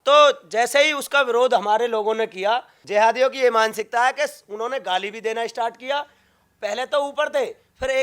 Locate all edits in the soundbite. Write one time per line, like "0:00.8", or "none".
0:02.8